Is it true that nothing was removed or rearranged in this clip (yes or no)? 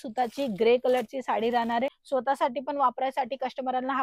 no